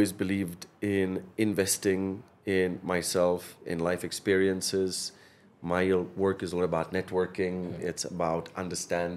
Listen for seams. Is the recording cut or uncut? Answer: uncut